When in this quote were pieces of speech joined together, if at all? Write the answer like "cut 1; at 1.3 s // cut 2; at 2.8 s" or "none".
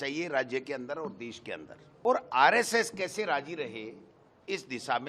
cut 1; at 2.0 s